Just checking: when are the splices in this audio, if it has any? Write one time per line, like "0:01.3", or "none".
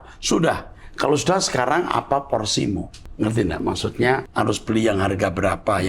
0:03.0
0:04.3